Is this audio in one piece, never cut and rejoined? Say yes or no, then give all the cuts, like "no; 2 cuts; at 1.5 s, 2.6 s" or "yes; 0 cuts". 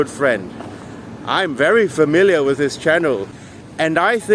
no; 1 cut; at 3.3 s